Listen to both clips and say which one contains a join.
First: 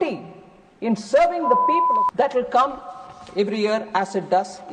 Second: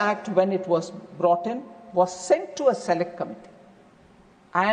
first; 1 cut; at 1.8 s

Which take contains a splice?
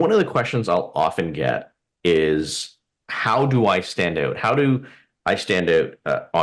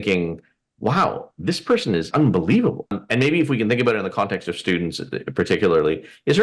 second; 2 cuts; at 2.1 s, 3.0 s

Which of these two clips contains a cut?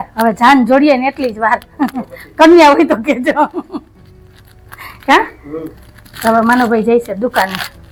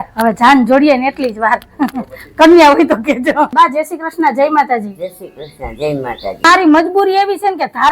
second; 2 cuts; at 3.5 s, 6.4 s

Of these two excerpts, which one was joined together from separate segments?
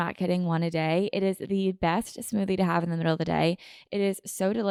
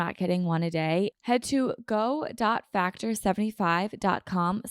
second; 1 cut; at 1.1 s

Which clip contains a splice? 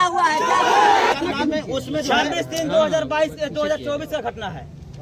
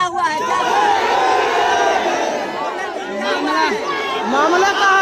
first; 1 cut; at 1.1 s

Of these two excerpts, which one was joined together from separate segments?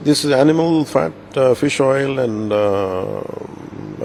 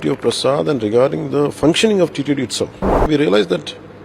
second; 1 cut; at 3.0 s

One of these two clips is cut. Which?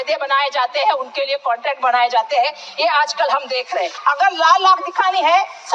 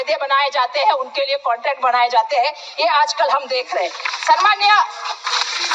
first; 1 cut; at 3.9 s

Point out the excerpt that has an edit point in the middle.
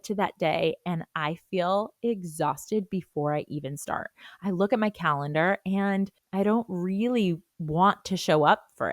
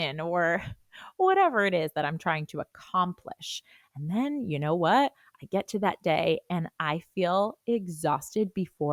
first; 2 cuts; at 6.2 s, 7.5 s

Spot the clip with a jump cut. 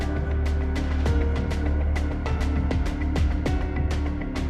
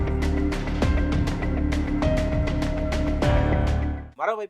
second; 1 cut; at 1.7 s

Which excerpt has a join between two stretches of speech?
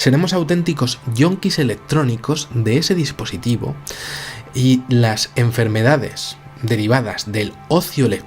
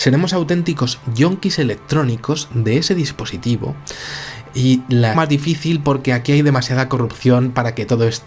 first; 1 cut; at 5.1 s

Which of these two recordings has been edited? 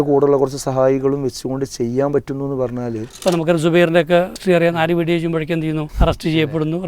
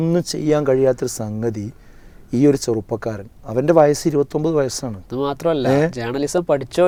first; 3 cuts; at 3.0 s, 4.4 s, 5.9 s

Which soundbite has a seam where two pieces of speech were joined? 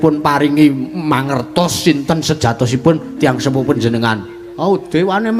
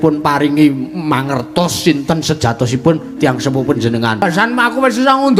second; 1 cut; at 4.2 s

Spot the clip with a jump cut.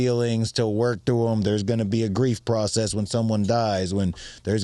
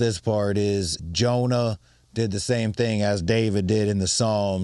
second; 1 cut; at 0.9 s

